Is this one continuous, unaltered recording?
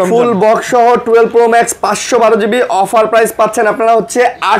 yes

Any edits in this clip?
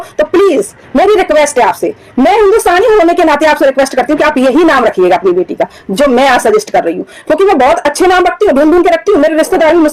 no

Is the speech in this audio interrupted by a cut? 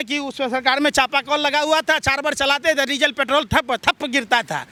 no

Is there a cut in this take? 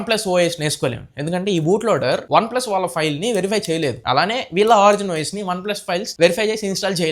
no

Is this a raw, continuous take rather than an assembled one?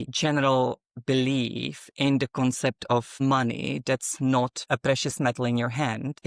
yes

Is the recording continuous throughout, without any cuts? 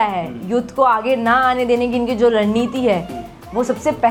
yes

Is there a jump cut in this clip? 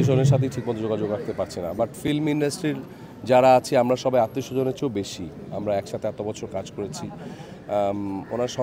no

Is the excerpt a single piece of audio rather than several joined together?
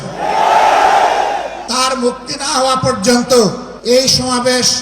no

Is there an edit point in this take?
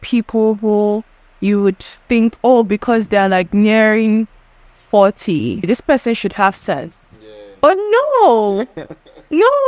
yes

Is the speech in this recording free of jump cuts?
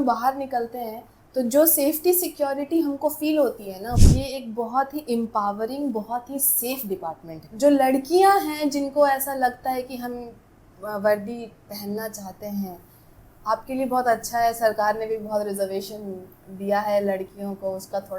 no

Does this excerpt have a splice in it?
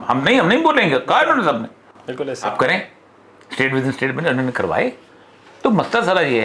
no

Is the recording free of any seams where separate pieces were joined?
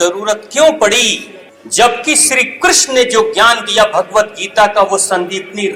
yes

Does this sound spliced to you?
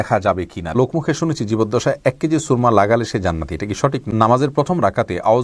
yes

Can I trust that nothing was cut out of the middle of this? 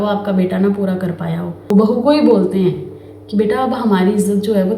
no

